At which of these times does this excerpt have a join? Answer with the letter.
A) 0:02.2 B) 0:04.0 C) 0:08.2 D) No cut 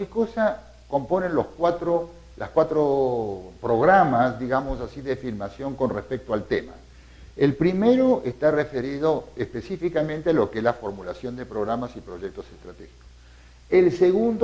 B